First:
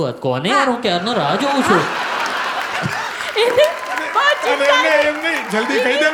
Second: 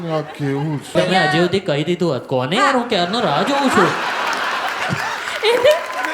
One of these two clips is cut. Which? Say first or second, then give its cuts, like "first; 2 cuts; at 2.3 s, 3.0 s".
second; 1 cut; at 0.9 s